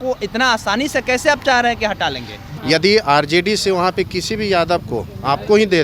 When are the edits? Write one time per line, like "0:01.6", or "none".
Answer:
0:02.4